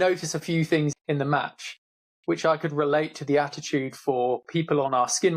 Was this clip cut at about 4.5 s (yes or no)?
no